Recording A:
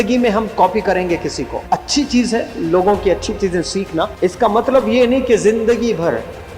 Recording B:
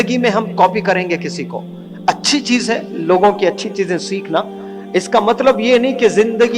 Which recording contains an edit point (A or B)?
A